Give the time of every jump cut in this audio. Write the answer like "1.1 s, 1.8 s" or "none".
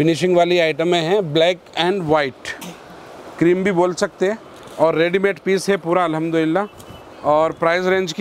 none